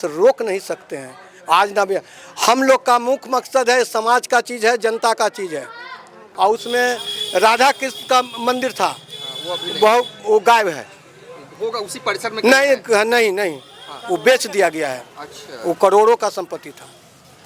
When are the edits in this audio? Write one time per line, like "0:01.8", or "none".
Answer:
0:06.2